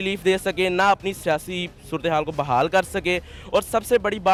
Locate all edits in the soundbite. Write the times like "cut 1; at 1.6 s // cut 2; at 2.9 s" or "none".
none